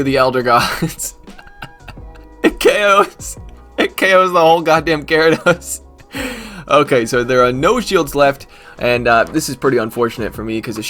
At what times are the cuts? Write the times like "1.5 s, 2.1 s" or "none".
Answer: none